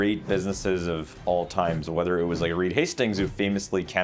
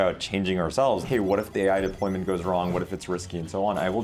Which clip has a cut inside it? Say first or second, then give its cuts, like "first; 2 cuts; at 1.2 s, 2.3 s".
second; 1 cut; at 1.0 s